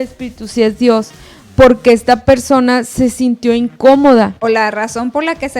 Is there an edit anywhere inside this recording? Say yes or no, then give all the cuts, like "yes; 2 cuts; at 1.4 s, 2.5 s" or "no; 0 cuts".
yes; 1 cut; at 4.4 s